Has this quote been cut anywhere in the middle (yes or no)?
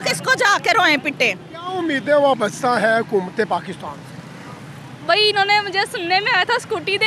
yes